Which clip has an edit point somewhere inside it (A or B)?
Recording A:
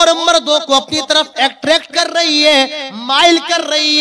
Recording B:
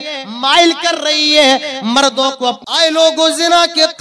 B